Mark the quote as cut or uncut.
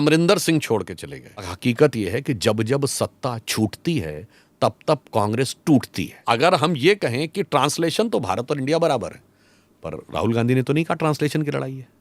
cut